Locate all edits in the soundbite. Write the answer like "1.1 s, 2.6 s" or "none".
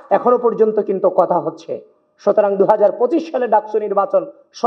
none